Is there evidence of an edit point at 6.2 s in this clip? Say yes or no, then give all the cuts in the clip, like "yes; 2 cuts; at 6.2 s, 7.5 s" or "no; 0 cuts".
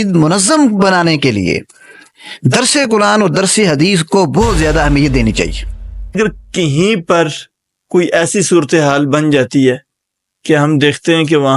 yes; 1 cut; at 6.2 s